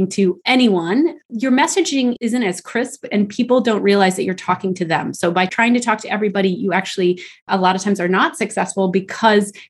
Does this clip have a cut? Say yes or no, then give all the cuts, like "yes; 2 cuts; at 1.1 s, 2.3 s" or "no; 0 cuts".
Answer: no; 0 cuts